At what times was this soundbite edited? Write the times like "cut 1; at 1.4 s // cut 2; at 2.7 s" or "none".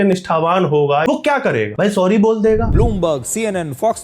cut 1; at 1.1 s // cut 2; at 2.7 s